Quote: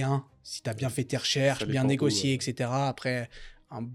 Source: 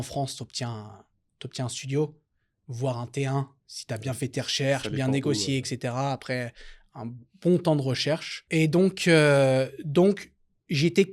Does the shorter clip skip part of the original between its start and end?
no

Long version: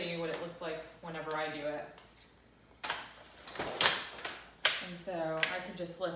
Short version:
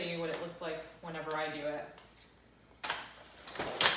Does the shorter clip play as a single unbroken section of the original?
yes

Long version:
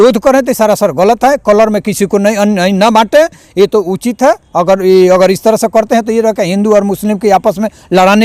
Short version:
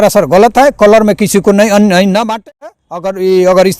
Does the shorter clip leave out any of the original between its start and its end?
yes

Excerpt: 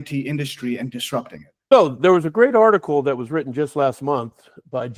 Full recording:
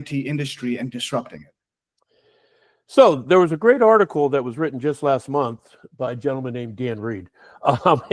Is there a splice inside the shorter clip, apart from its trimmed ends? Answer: yes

